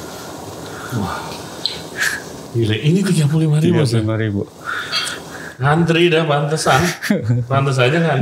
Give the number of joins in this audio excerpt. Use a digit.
0